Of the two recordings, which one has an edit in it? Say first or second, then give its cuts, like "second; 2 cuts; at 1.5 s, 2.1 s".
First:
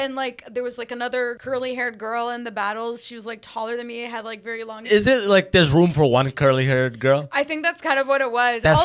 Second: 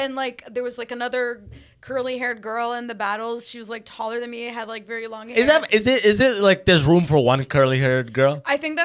first; 2 cuts; at 1.4 s, 4.9 s